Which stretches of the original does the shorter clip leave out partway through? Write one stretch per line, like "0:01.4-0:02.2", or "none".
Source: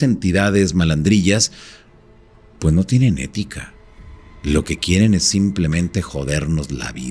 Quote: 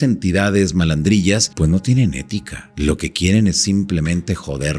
0:01.5-0:02.5
0:03.6-0:04.3